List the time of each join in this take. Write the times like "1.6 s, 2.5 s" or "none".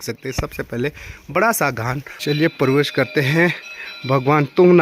2.1 s